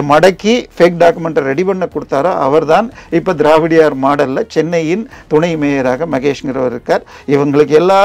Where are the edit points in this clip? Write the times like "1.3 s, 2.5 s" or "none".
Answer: none